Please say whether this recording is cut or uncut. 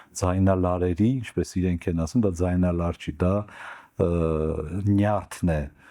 uncut